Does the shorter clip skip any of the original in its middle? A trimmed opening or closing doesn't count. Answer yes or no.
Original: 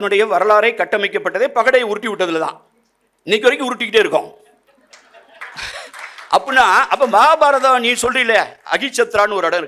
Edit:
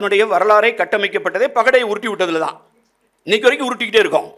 no